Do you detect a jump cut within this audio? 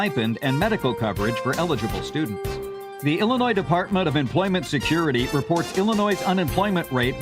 yes; 1 cut; at 2.8 s

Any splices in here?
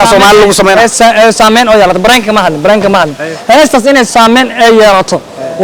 no; 0 cuts

